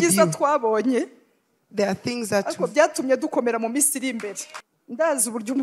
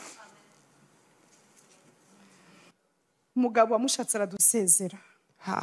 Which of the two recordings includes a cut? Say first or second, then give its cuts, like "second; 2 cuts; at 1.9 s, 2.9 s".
first; 1 cut; at 4.4 s